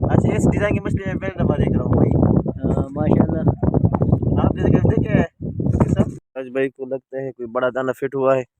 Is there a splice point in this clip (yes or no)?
yes